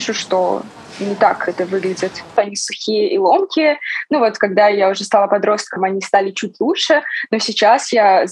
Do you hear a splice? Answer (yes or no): yes